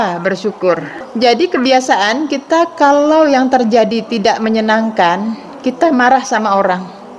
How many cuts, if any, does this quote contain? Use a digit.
1